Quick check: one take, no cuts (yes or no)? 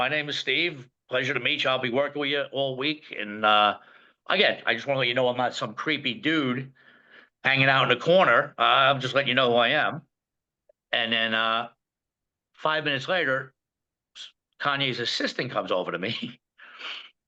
yes